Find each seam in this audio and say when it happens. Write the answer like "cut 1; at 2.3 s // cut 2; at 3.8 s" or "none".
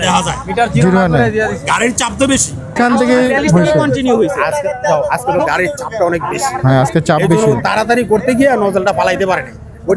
cut 1; at 2.8 s

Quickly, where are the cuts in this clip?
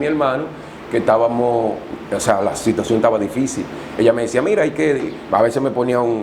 none

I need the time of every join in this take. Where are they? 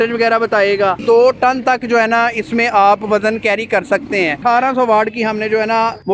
cut 1; at 1.0 s // cut 2; at 4.4 s

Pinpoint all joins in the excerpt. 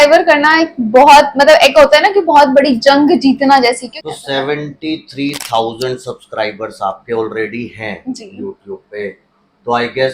cut 1; at 3.9 s

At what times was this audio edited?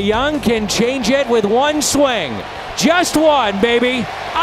none

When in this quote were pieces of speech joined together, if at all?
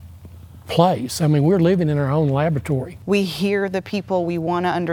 cut 1; at 2.9 s

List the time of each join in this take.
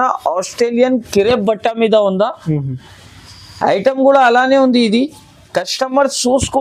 none

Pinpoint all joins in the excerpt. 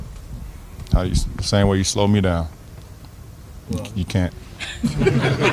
none

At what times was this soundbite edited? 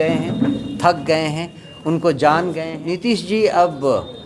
cut 1; at 2.7 s

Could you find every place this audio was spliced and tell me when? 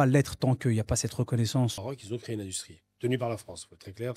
cut 1; at 1.8 s

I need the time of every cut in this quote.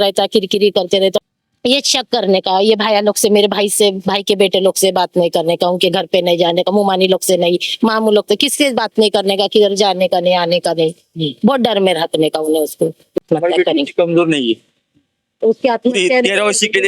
cut 1; at 1.2 s // cut 2; at 13.2 s

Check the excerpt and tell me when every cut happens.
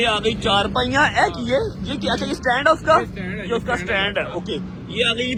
none

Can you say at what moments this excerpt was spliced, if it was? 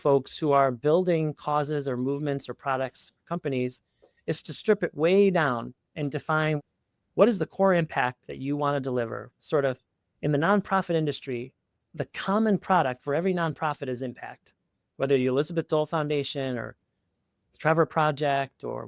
cut 1; at 6.6 s

